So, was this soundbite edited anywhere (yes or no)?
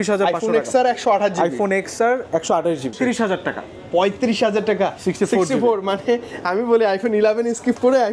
yes